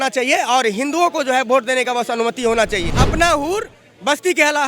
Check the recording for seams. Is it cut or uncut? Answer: cut